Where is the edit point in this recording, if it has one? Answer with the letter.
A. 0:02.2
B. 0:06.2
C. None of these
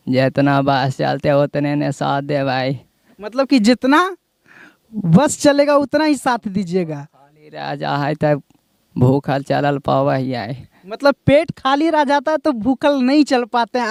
C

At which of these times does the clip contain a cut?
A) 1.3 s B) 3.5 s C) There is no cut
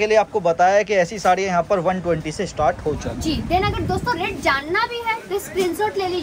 C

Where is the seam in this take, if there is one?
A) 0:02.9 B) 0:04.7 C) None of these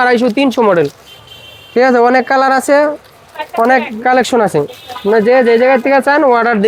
C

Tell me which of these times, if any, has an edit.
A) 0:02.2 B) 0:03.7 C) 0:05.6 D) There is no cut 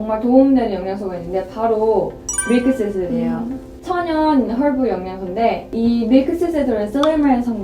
B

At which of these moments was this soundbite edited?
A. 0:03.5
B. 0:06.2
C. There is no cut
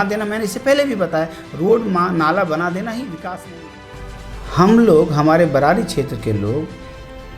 A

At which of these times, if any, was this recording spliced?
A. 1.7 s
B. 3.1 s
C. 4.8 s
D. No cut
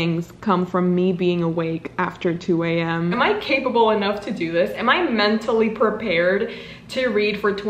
B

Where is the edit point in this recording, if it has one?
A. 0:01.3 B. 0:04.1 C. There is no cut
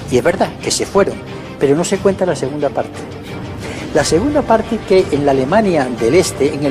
A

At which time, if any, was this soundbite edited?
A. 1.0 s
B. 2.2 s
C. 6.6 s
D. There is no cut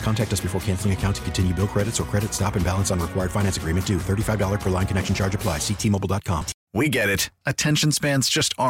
C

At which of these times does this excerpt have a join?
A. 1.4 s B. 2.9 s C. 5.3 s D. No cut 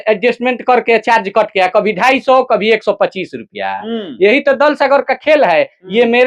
D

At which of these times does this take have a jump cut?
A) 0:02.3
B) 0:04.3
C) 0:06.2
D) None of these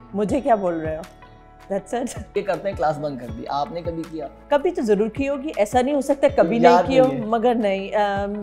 A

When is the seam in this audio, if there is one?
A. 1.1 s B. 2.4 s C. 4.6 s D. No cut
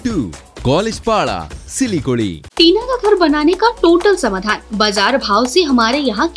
B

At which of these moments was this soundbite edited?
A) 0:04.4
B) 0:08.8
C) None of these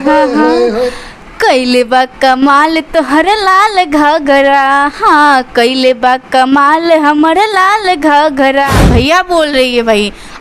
B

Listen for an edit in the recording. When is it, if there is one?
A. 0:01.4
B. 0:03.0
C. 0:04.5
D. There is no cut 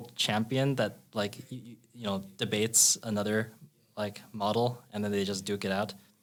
D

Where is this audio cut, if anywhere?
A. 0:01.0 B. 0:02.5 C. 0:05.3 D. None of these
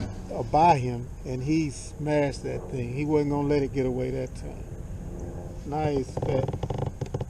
D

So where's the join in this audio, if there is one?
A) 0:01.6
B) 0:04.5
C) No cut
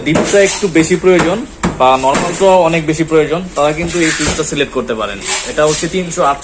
C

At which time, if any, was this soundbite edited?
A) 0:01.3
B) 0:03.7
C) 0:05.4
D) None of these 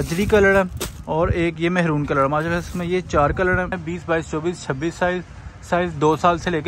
B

